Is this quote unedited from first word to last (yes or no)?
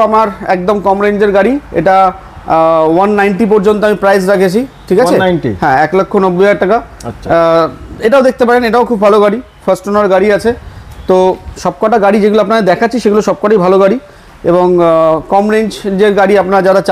yes